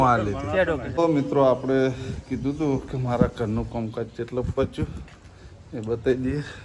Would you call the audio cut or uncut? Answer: cut